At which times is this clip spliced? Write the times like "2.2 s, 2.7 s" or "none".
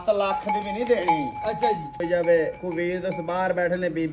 2.0 s

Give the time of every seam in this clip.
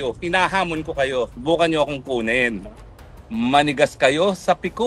3.2 s

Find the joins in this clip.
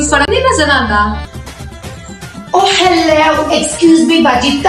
1.3 s

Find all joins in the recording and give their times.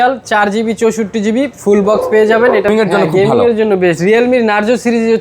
2.7 s

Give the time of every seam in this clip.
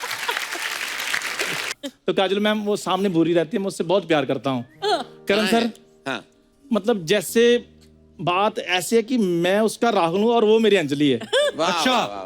1.7 s

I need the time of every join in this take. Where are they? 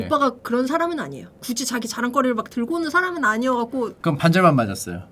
1.4 s, 4.0 s

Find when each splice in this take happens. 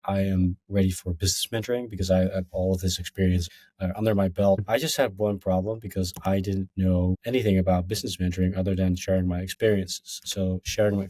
3.6 s, 4.6 s, 7.2 s

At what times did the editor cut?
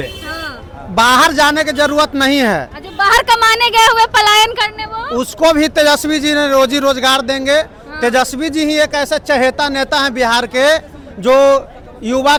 none

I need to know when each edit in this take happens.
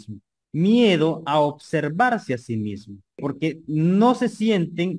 3.2 s

